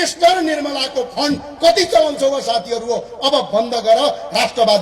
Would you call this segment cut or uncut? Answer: uncut